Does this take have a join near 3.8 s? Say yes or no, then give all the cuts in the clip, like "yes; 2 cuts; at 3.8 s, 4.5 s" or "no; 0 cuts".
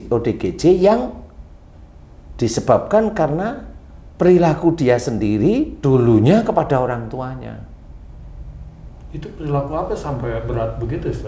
no; 0 cuts